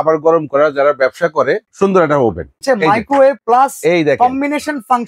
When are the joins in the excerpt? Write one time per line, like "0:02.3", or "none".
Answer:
0:01.7
0:02.6
0:03.4